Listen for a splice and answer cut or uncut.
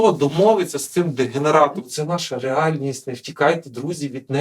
cut